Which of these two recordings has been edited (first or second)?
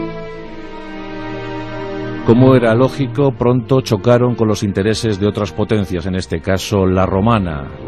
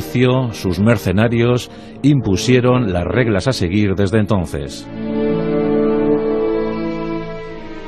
first